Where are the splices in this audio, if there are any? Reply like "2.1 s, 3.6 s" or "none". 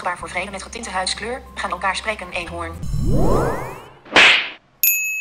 2.7 s